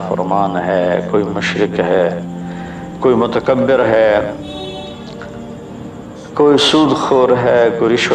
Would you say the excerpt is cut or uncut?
uncut